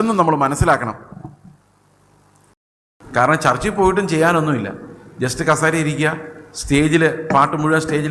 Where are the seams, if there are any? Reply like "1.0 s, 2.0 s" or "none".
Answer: 2.4 s